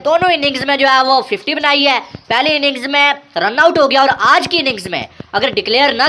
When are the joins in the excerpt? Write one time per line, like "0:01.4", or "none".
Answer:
none